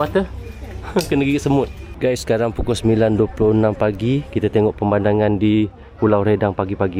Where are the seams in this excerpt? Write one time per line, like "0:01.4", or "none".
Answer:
none